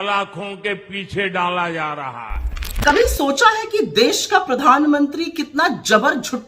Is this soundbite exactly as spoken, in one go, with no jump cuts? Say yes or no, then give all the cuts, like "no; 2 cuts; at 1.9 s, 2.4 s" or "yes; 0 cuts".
no; 1 cut; at 2.6 s